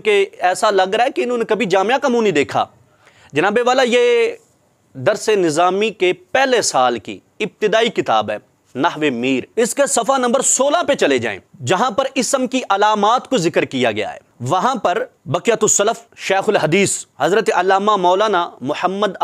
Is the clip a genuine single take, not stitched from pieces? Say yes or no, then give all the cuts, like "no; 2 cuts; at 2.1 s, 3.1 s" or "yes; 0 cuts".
yes; 0 cuts